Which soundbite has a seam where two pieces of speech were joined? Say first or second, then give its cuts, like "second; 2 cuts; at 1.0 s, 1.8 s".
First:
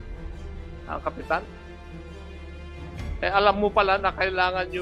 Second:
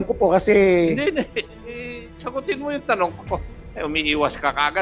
first; 2 cuts; at 1.6 s, 3.2 s